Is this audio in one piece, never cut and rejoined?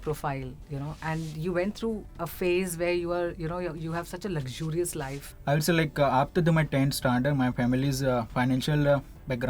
no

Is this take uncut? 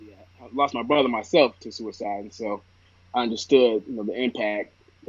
yes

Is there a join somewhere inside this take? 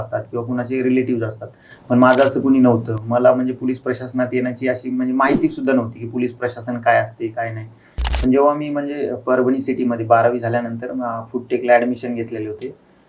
no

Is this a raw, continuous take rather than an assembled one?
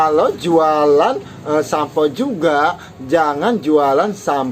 yes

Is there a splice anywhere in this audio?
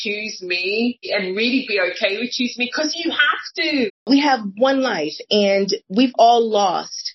yes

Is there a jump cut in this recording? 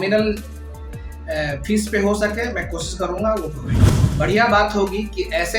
yes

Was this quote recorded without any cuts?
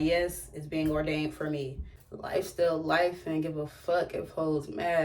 no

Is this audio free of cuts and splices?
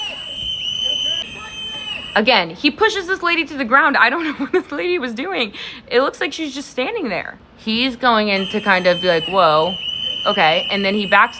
yes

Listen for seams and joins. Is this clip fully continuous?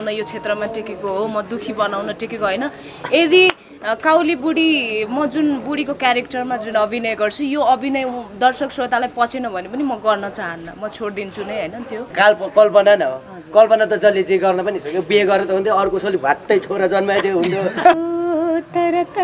no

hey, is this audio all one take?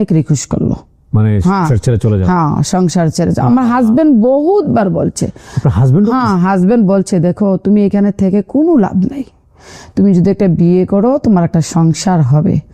yes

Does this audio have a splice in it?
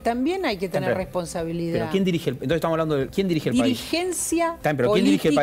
yes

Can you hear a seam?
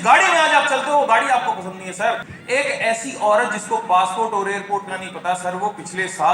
yes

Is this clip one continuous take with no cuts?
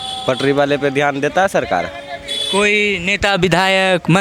yes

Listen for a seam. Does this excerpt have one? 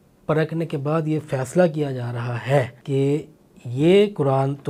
yes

